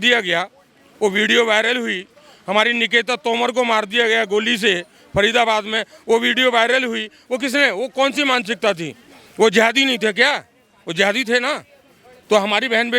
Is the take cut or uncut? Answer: uncut